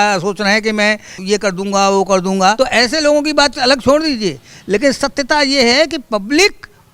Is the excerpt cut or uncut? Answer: cut